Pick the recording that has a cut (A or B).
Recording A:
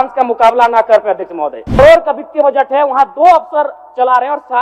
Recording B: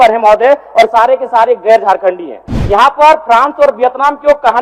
A